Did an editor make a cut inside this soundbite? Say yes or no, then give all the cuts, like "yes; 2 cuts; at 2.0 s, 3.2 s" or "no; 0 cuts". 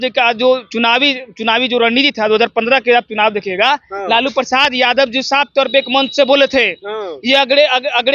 no; 0 cuts